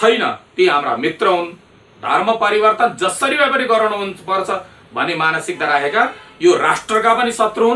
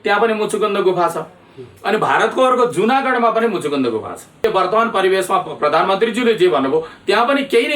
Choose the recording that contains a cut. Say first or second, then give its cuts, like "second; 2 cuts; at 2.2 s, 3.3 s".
second; 1 cut; at 4.4 s